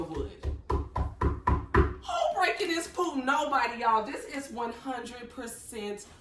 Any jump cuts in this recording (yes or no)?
no